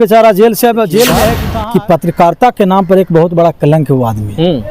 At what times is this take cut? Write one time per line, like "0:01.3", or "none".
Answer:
0:01.4